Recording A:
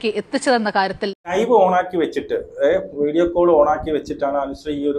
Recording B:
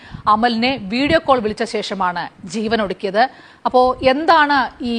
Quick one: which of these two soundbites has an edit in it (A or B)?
A